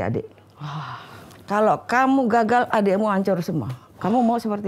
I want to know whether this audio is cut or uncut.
uncut